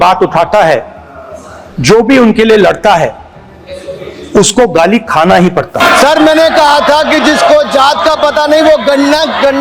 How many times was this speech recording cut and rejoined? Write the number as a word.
one